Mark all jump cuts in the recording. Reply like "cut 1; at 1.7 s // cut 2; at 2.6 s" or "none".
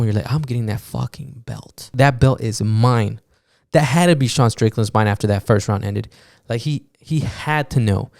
cut 1; at 1.9 s